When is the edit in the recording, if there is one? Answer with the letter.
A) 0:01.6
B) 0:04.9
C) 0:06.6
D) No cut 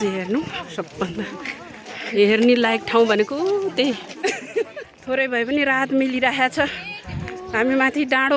B